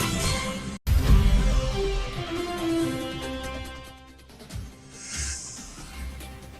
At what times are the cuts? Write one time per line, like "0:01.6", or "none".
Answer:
0:05.6